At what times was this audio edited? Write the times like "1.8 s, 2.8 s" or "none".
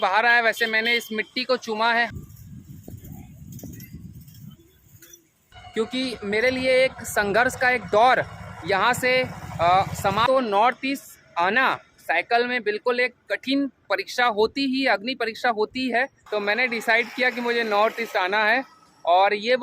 2.1 s, 5.6 s, 10.3 s, 16.2 s